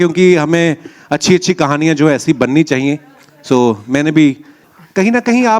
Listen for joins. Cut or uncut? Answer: cut